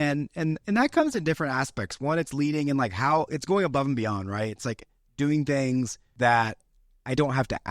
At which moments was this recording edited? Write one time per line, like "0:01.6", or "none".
0:06.0